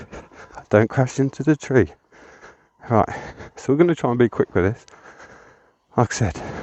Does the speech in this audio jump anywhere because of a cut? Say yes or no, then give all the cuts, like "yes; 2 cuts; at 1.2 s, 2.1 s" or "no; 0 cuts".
no; 0 cuts